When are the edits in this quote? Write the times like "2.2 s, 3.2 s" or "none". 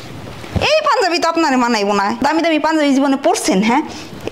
2.2 s